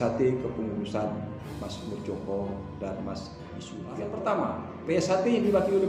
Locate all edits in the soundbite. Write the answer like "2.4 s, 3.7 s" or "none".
3.9 s